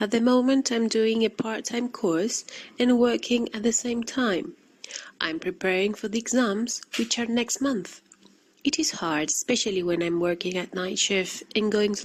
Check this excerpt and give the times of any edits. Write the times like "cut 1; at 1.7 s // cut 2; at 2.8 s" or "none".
none